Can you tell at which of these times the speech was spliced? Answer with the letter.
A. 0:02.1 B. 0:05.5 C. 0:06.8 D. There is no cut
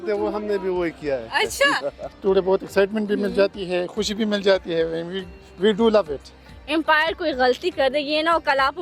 A